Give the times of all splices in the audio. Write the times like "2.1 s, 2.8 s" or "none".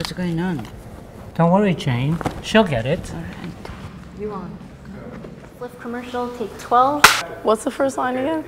3.7 s, 5.5 s

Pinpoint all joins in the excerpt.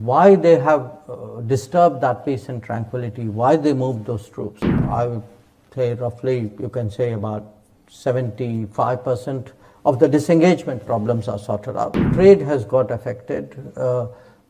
4.8 s, 12.1 s

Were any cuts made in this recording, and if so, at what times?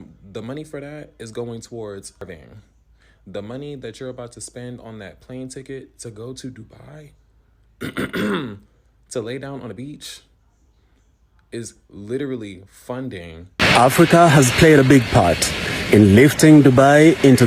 2.2 s, 13.4 s

